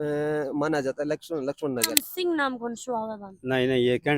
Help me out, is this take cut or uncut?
cut